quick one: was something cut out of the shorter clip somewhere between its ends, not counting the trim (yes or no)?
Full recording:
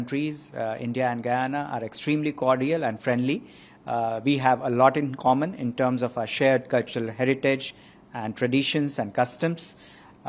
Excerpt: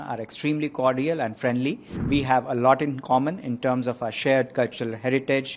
yes